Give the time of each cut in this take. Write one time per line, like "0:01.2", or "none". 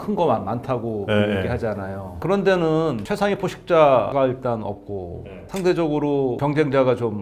none

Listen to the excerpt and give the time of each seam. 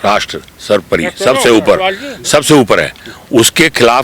none

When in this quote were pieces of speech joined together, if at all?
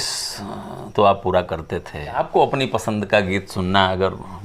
0:02.2

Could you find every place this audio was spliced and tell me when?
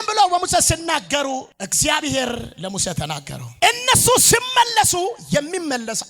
none

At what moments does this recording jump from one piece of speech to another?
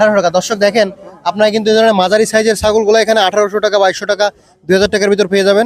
none

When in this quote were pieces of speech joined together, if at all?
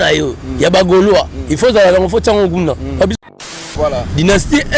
0:03.2

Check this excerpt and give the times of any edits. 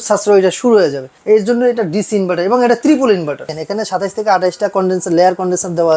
0:01.1
0:03.5

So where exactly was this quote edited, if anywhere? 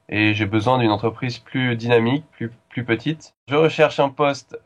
0:03.3

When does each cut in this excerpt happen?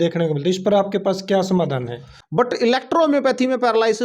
0:02.4

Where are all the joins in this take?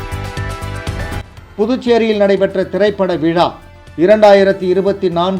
0:01.4

